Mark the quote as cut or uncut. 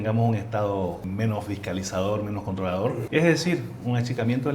cut